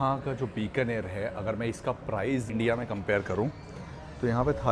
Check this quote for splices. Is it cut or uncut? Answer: cut